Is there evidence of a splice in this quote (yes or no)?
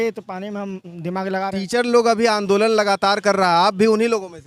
yes